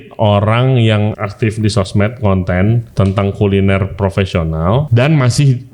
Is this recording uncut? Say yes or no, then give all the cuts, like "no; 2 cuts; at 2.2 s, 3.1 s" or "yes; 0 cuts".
no; 3 cuts; at 1.1 s, 2.9 s, 4.9 s